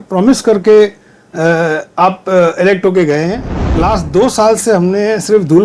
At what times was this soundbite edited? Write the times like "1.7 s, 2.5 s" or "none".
3.5 s